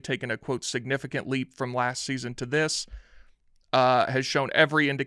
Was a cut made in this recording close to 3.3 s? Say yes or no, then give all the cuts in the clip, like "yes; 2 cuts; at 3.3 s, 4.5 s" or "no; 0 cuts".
no; 0 cuts